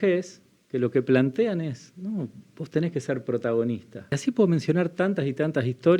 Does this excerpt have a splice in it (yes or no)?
yes